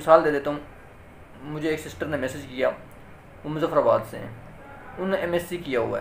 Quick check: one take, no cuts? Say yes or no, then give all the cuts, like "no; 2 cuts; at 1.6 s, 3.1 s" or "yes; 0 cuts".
yes; 0 cuts